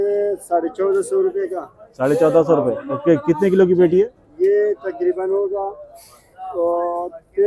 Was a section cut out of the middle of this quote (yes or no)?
no